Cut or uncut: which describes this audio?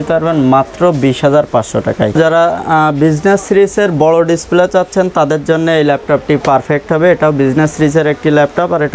cut